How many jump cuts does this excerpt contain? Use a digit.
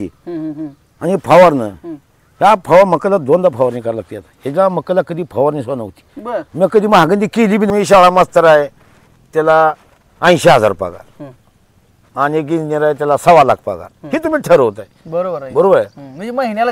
1